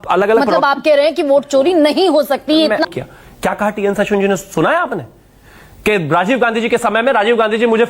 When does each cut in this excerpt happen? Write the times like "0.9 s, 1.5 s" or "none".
2.9 s